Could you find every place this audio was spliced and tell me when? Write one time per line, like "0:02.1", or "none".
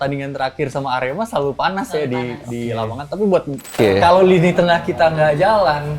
0:03.7